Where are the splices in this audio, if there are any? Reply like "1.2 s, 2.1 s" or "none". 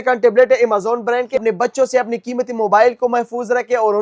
1.4 s